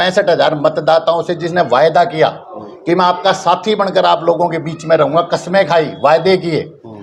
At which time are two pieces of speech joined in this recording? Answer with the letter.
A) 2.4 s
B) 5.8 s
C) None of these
C